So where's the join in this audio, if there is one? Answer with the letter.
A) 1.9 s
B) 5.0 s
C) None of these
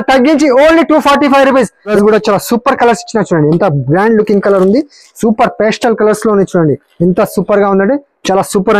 A